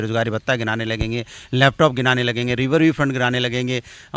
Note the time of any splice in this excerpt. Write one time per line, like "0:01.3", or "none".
none